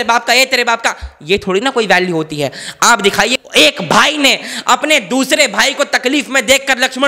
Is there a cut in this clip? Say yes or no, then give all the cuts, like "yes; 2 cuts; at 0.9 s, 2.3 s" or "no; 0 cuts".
yes; 1 cut; at 3.3 s